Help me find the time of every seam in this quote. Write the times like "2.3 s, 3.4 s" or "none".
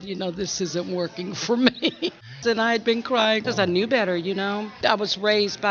2.4 s, 3.4 s, 4.7 s